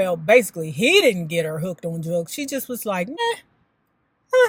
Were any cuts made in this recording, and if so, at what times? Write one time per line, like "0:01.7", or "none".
none